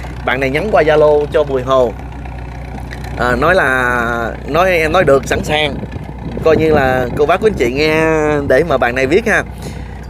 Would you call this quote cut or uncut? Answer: uncut